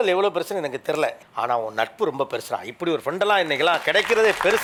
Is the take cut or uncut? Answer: uncut